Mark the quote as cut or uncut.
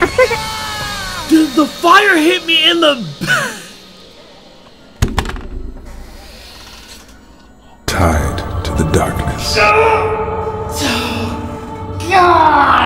uncut